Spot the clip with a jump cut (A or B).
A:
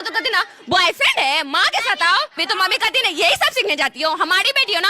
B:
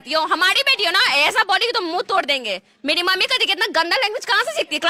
A